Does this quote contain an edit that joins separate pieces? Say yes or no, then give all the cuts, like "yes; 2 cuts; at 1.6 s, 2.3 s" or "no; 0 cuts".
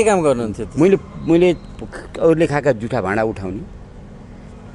no; 0 cuts